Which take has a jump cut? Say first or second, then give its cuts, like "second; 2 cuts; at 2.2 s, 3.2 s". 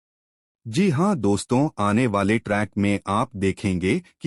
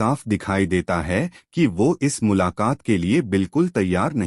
second; 1 cut; at 2.5 s